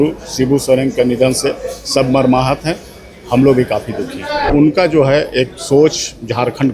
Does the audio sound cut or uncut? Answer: cut